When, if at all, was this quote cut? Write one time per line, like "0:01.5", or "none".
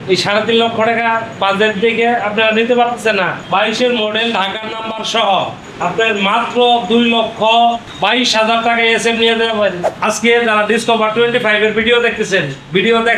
0:09.9